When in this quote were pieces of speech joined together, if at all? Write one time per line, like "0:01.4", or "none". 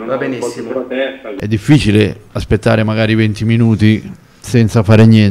0:01.3